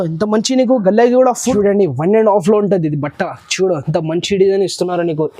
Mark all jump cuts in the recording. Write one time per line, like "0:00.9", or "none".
0:01.5

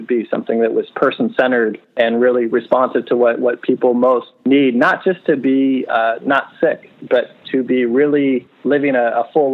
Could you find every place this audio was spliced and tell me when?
0:01.8
0:04.3
0:08.5

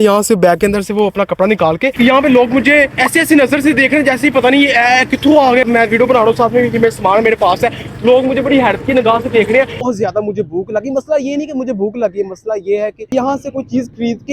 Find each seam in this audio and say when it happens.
0:01.9
0:05.6
0:09.8

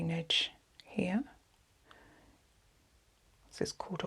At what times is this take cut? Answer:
0:01.9

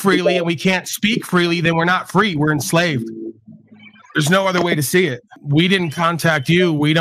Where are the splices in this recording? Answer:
0:05.3

